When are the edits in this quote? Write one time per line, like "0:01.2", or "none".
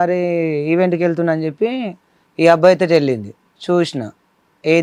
none